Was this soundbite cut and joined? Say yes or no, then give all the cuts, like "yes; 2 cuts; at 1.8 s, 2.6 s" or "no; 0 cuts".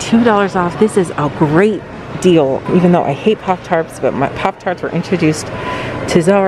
no; 0 cuts